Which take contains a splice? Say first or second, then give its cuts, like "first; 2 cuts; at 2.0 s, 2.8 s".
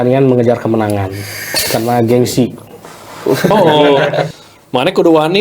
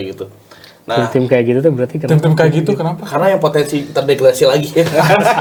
first; 1 cut; at 4.4 s